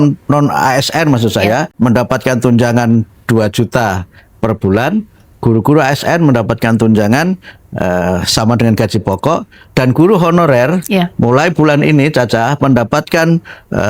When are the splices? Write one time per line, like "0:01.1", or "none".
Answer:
0:01.7